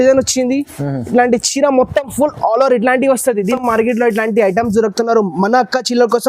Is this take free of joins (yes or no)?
no